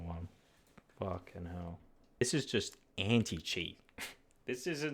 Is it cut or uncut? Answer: cut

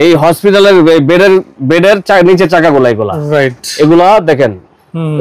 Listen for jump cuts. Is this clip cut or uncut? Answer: uncut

